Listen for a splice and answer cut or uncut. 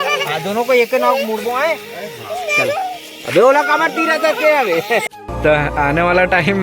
cut